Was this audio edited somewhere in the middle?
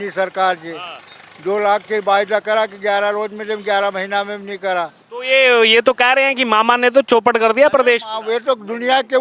yes; 1 cut; at 5.1 s

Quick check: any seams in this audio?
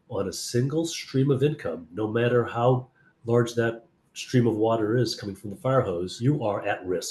yes; 1 cut; at 6.1 s

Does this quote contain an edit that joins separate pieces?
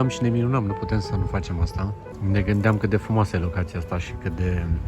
yes; 1 cut; at 2.1 s

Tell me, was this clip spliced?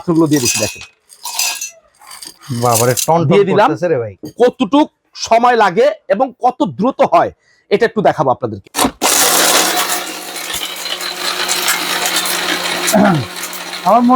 yes; 3 cuts; at 2.3 s, 4.1 s, 8.6 s

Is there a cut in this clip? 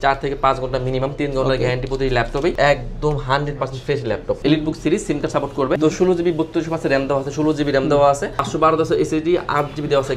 yes; 4 cuts; at 2.6 s, 4.4 s, 5.8 s, 8.4 s

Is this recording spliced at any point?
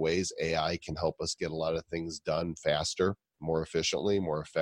no; 0 cuts

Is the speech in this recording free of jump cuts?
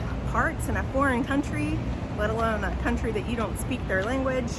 yes; 0 cuts

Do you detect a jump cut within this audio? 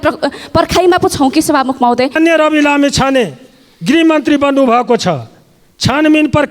yes; 1 cut; at 2.2 s

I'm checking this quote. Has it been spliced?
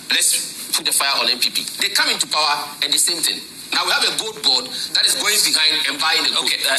no; 0 cuts

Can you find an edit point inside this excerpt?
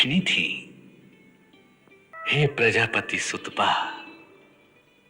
yes; 1 cut; at 2.1 s

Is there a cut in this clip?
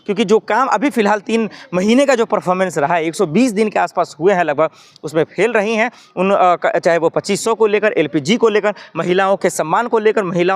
no; 0 cuts

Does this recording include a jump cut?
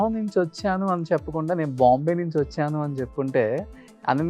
no; 0 cuts

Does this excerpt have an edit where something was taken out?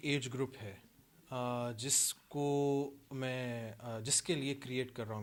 no; 0 cuts

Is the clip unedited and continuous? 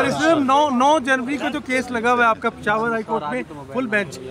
yes; 0 cuts

